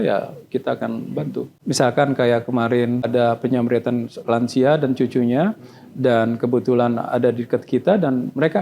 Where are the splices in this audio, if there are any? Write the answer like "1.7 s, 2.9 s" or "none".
1.6 s, 3.1 s